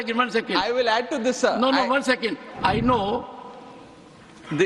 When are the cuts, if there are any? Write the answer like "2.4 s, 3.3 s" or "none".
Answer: 2.5 s